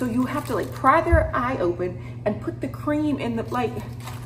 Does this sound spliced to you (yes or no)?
no